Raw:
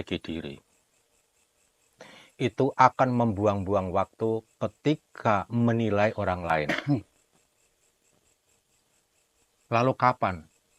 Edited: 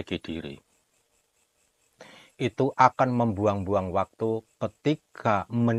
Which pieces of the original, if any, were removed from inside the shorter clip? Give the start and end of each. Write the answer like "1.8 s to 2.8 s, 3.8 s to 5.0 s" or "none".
none